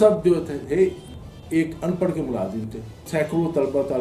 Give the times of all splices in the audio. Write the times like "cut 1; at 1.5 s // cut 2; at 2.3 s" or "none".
cut 1; at 3.0 s